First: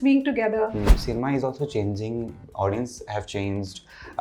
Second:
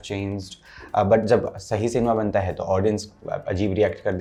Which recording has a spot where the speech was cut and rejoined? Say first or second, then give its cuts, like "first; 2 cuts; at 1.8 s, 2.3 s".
first; 1 cut; at 0.9 s